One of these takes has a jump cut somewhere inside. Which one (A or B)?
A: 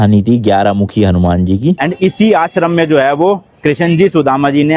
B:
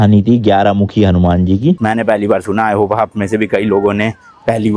A